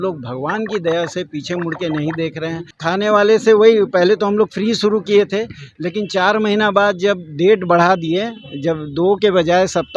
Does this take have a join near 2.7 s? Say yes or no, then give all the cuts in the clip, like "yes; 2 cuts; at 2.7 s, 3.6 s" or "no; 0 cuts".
yes; 1 cut; at 2.7 s